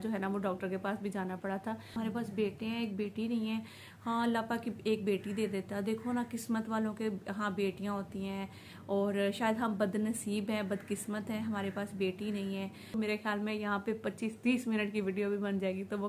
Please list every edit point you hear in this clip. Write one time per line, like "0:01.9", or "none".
0:01.9
0:12.9